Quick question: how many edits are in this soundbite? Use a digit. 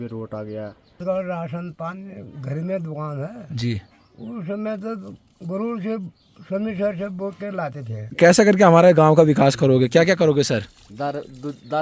2